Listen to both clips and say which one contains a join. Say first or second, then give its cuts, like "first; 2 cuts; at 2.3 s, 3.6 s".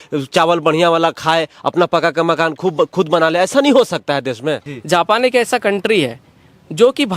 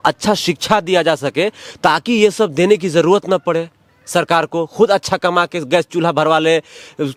first; 1 cut; at 4.7 s